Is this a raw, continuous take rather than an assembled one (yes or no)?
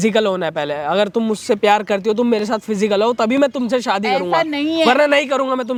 yes